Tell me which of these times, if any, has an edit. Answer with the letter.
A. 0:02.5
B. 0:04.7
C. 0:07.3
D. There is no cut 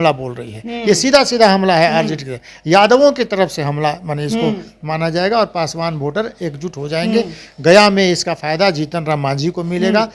D